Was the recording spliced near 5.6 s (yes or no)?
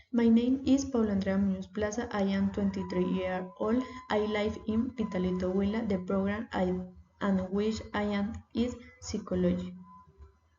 no